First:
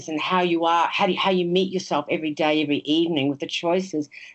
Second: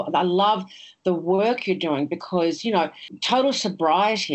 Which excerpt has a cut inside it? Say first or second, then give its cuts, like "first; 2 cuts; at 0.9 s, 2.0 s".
second; 1 cut; at 3.1 s